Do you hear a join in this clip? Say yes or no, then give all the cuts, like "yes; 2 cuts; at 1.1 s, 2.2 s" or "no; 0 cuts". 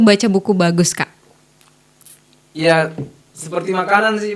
no; 0 cuts